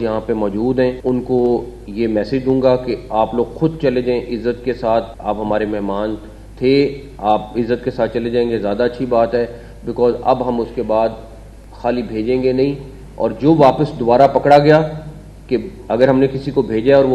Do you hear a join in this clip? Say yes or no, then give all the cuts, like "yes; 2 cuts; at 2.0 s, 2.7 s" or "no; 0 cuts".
yes; 2 cuts; at 1.0 s, 5.1 s